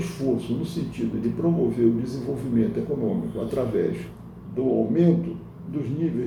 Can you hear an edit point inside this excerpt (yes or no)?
no